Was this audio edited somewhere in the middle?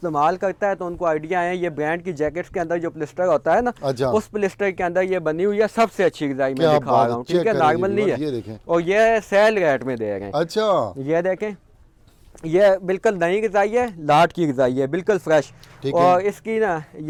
no; 0 cuts

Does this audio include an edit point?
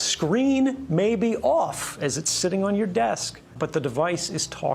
yes; 1 cut; at 3.5 s

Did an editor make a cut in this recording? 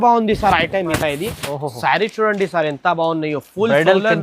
yes; 1 cut; at 0.9 s

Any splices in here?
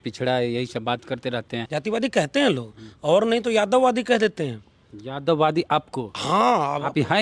yes; 1 cut; at 1.7 s

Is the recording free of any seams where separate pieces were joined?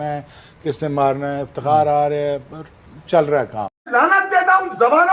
no; 1 cut; at 3.9 s

